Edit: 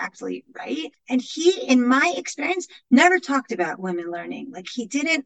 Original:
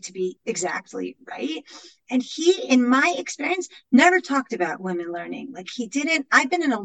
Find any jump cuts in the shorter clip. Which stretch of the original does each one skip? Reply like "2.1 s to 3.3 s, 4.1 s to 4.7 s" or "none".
1.7 s to 2.0 s